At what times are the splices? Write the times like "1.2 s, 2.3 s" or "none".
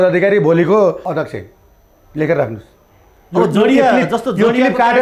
1.0 s